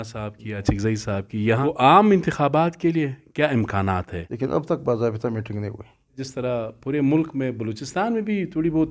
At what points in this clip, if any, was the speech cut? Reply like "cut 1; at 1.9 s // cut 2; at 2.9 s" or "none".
cut 1; at 1.6 s // cut 2; at 4.2 s // cut 3; at 6.3 s